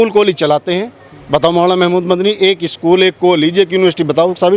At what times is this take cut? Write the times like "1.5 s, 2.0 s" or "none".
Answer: none

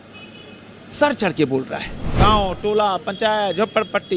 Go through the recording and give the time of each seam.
2.1 s

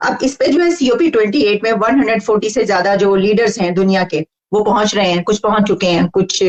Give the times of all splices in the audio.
none

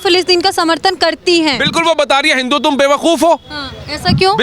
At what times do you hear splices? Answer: none

